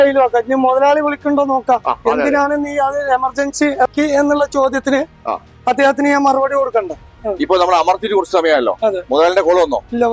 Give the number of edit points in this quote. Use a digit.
2